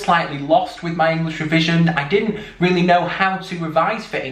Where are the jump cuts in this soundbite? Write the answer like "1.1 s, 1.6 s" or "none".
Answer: none